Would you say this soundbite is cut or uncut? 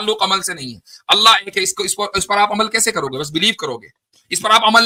uncut